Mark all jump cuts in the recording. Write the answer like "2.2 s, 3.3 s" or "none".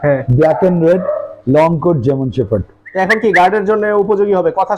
2.8 s